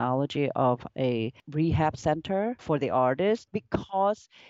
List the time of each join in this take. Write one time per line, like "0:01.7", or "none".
0:01.4
0:02.6
0:03.5